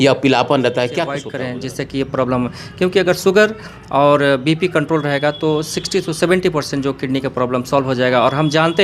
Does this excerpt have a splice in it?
yes; 1 cut; at 1.3 s

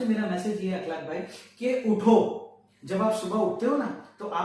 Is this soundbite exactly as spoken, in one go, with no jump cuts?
yes; 0 cuts

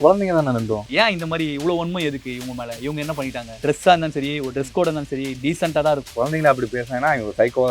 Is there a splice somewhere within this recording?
yes; 3 cuts; at 0.8 s, 3.6 s, 6.1 s

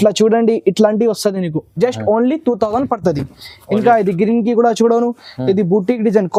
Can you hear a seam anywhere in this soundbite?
no; 0 cuts

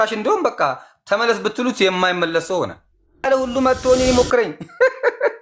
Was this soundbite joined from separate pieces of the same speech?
yes; 1 cut; at 3.3 s

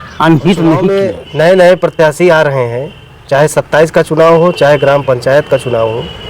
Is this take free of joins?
no; 1 cut; at 0.9 s

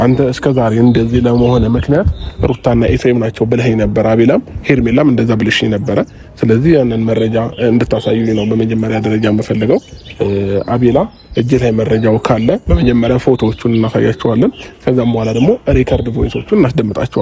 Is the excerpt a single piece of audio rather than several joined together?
yes; 0 cuts

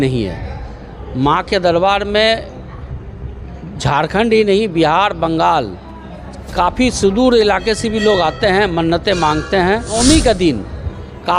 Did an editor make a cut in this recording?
yes; 1 cut; at 10.2 s

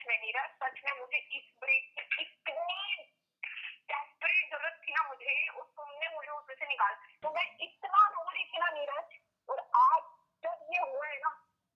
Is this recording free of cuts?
no; 1 cut; at 7.2 s

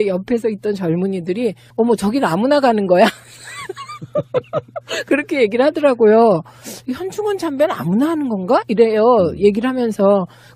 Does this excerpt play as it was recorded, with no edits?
yes; 0 cuts

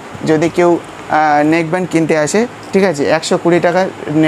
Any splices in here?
no; 0 cuts

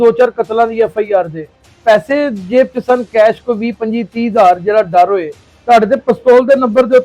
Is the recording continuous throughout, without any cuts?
no; 2 cuts; at 1.7 s, 5.5 s

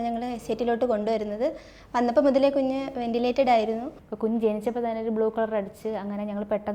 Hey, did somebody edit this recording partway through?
yes; 1 cut; at 4.0 s

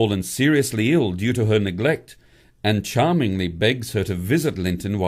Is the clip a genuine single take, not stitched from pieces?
no; 1 cut; at 2.4 s

